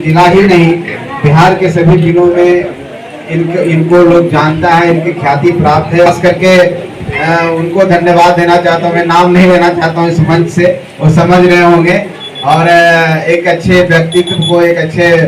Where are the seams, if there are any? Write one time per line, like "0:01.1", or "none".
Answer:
0:06.1